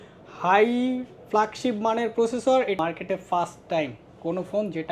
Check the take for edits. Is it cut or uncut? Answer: cut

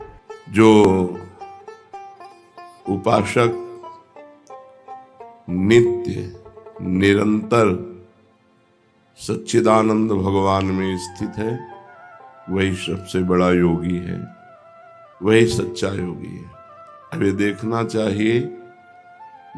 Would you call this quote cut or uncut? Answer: cut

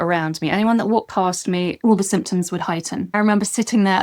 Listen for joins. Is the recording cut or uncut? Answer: cut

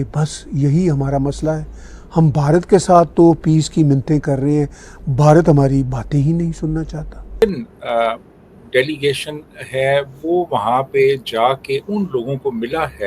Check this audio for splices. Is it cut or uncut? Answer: cut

